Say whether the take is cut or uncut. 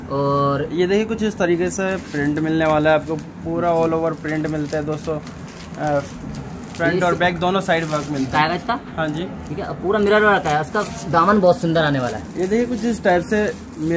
cut